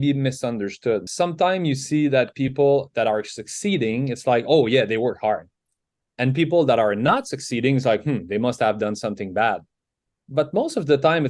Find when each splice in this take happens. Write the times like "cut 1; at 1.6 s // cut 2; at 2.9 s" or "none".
cut 1; at 1.1 s